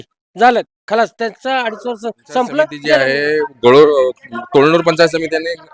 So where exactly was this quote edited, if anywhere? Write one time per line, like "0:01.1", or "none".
0:03.0